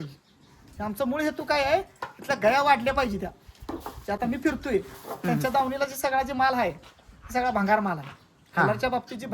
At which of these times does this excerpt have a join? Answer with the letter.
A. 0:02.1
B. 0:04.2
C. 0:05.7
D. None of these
D